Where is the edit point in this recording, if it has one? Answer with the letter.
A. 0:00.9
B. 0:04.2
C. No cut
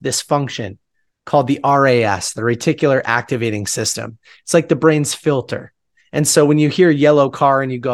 C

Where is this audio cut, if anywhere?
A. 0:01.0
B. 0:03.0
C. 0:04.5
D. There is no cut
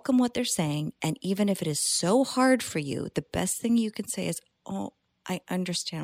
D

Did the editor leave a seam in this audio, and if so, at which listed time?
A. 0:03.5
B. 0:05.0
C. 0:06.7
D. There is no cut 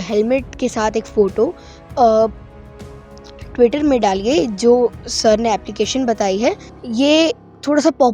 C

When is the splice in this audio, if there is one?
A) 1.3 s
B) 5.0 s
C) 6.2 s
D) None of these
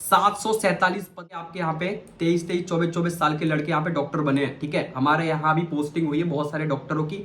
A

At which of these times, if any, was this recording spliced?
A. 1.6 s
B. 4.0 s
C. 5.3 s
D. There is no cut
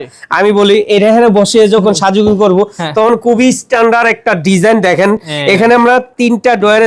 D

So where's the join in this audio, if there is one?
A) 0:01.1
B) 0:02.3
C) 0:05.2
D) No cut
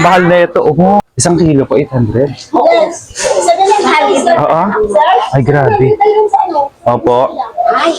A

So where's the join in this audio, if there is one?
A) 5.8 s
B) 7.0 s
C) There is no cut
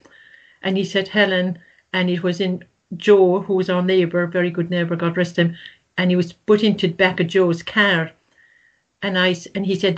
C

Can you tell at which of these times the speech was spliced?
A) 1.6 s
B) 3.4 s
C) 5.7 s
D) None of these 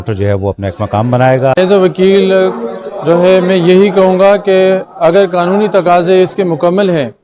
A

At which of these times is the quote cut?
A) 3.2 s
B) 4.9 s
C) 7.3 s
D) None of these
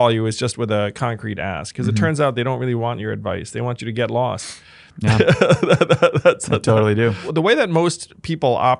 C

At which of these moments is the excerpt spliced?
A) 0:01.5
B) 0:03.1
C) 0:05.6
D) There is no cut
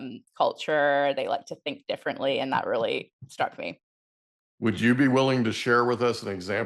D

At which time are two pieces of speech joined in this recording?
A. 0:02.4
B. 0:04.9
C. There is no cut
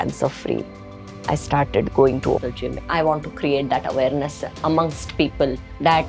A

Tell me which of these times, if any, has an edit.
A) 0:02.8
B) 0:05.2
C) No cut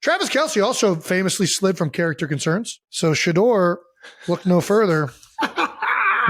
A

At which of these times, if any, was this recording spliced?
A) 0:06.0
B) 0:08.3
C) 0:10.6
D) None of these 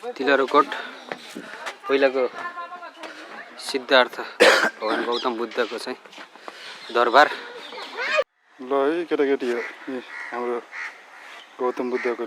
B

